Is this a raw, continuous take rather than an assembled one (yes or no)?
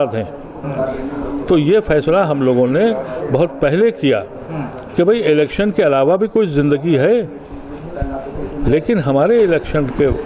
yes